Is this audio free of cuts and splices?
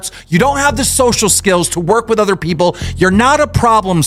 yes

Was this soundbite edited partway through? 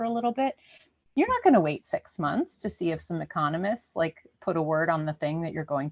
no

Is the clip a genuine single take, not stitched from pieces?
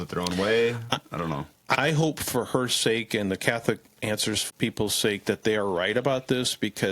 no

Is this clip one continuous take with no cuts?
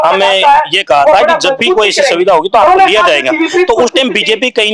yes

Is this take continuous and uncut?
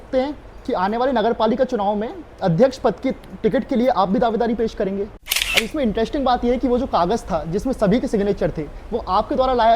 no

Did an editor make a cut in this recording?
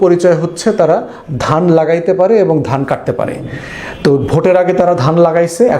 no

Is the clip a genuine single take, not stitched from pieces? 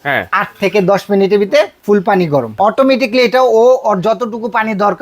no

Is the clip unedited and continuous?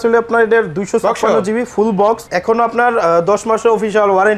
no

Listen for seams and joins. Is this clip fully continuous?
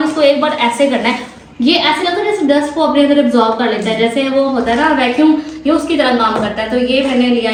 yes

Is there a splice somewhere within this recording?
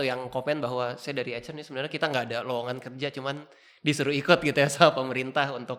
no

